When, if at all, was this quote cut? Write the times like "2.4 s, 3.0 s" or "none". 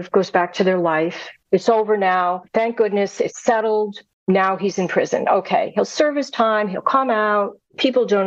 1.4 s, 2.4 s, 4.1 s